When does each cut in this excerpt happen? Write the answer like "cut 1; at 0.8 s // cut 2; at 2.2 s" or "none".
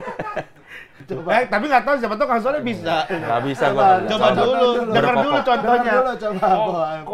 cut 1; at 1.0 s